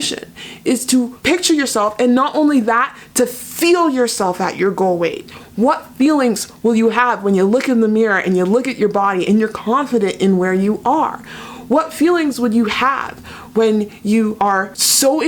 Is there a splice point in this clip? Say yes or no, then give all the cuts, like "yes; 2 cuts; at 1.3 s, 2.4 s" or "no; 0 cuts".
yes; 2 cuts; at 1.2 s, 14.5 s